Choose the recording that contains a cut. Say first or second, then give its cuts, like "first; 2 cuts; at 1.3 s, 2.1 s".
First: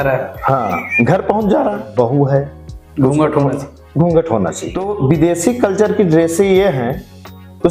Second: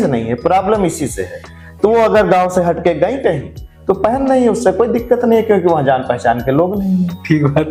first; 2 cuts; at 1.8 s, 4.9 s